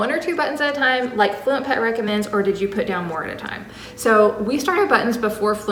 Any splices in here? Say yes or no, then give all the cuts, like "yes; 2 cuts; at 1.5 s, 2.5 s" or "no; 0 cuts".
no; 0 cuts